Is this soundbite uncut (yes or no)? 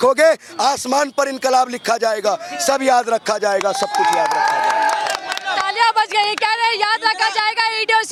yes